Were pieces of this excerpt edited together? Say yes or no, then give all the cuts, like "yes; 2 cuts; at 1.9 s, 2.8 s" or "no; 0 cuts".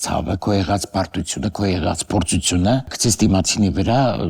yes; 1 cut; at 2.9 s